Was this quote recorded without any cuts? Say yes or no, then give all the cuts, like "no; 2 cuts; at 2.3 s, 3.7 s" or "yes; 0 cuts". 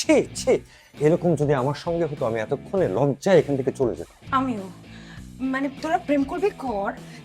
yes; 0 cuts